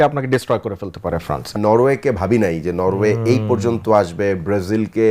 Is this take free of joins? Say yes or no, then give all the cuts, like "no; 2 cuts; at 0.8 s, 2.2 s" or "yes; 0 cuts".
no; 1 cut; at 1.6 s